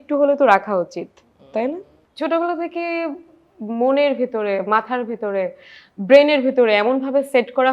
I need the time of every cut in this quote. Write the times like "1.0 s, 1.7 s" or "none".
2.1 s